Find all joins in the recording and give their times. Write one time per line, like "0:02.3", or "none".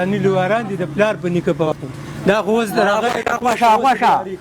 0:01.7